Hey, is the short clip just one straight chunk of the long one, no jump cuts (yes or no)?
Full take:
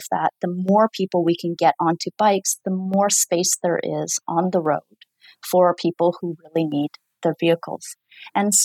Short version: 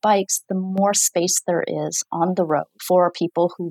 no